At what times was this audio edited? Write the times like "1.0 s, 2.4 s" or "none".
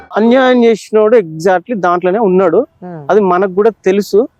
none